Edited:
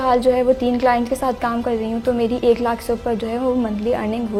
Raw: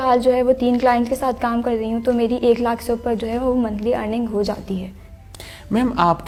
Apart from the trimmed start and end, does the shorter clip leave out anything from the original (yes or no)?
no